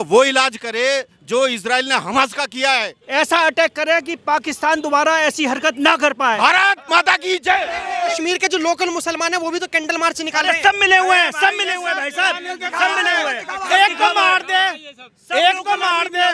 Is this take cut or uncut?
cut